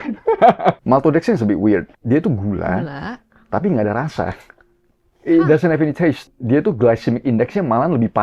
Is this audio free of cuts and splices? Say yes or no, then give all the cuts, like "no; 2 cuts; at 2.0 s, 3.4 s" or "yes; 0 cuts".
no; 3 cuts; at 0.8 s, 1.9 s, 6.3 s